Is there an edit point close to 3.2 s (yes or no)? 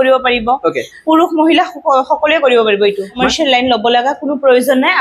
yes